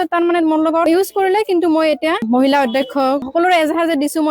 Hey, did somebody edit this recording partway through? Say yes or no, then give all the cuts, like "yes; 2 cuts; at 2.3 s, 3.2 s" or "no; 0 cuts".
yes; 2 cuts; at 2.2 s, 3.3 s